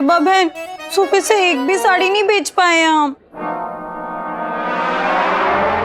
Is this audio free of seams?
yes; 0 cuts

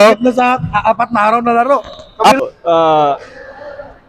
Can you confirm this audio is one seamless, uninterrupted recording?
no; 1 cut; at 2.4 s

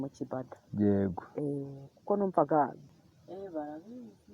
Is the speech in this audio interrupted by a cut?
yes; 1 cut; at 2.8 s

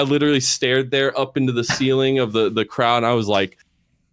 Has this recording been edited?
no; 0 cuts

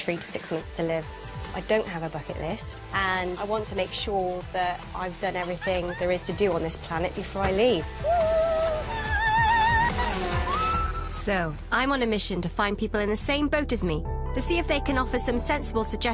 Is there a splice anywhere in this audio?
yes; 1 cut; at 1.1 s

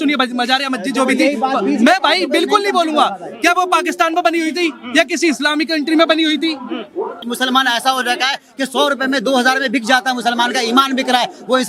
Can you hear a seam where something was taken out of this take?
yes; 1 cut; at 7.2 s

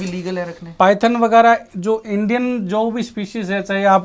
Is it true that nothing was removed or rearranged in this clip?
yes; 0 cuts

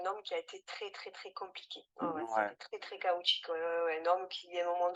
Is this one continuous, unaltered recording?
yes; 0 cuts

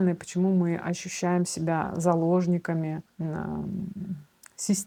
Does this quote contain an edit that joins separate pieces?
no; 0 cuts

